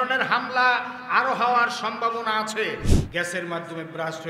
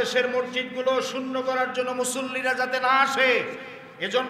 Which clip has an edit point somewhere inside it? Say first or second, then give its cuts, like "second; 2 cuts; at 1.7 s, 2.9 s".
first; 1 cut; at 2.9 s